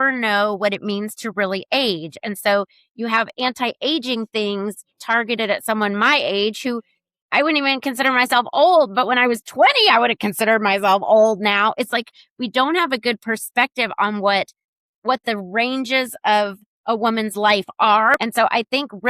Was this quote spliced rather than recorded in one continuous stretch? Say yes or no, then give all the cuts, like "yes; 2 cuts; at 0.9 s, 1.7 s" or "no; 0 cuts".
yes; 1 cut; at 18.2 s